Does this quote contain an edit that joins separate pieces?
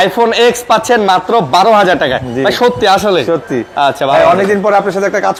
no; 0 cuts

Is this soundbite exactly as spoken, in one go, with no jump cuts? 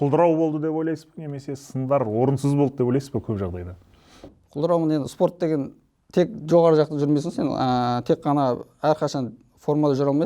yes; 0 cuts

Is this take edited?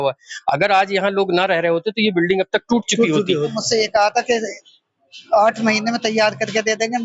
yes; 1 cut; at 3.6 s

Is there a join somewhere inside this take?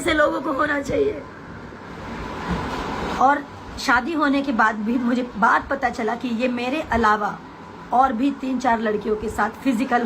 yes; 1 cut; at 2.1 s

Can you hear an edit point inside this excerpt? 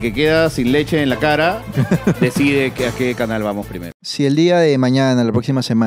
yes; 1 cut; at 3.8 s

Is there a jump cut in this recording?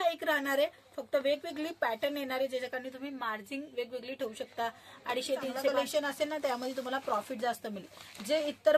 yes; 1 cut; at 5.7 s

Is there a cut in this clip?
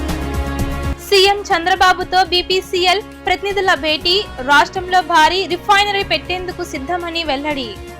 yes; 1 cut; at 1.0 s

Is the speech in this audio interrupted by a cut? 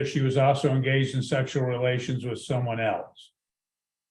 no; 0 cuts

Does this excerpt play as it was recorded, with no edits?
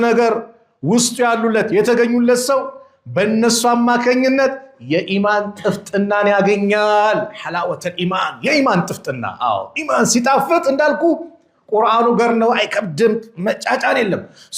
yes; 0 cuts

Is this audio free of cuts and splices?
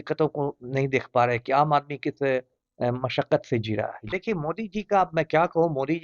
no; 1 cut; at 4.0 s

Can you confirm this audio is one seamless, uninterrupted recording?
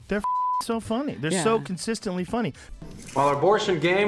no; 1 cut; at 2.6 s

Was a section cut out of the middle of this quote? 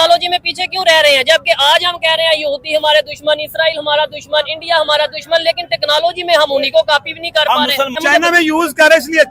yes; 1 cut; at 8.0 s

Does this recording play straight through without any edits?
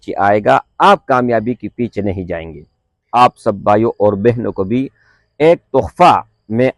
no; 1 cut; at 3.0 s

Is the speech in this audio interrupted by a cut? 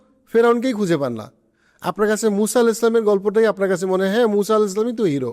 no; 0 cuts

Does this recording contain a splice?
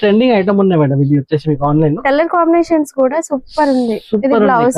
no; 0 cuts

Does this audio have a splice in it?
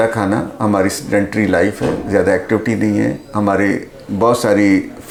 no; 0 cuts

